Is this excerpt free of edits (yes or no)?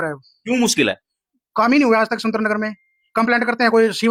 yes